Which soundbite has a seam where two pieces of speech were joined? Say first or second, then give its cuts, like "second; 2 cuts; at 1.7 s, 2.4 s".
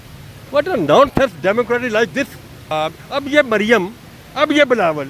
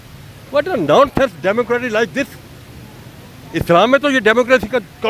first; 1 cut; at 2.6 s